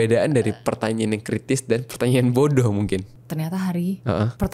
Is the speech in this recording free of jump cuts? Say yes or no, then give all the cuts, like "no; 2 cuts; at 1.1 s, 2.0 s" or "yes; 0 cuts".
no; 1 cut; at 3.1 s